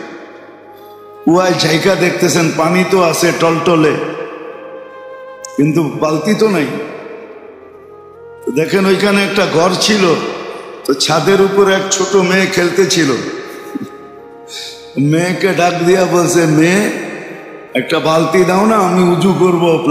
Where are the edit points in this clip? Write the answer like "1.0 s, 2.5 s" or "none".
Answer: none